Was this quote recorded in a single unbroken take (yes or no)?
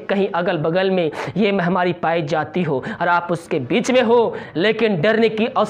yes